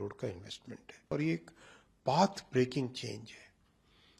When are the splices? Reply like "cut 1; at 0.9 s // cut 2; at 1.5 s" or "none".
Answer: cut 1; at 1.1 s